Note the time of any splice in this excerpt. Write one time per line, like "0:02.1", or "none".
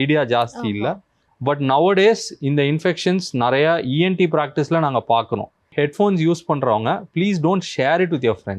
0:05.7